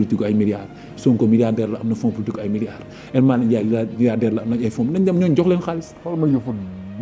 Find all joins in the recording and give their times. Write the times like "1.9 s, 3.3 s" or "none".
5.9 s